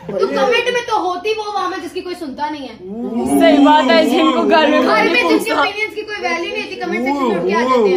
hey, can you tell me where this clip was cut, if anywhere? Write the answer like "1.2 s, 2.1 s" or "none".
none